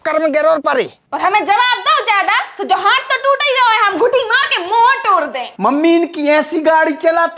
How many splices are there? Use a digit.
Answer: 2